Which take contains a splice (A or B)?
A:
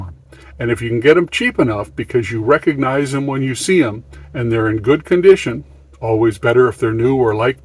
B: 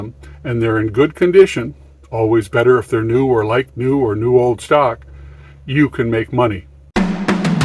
B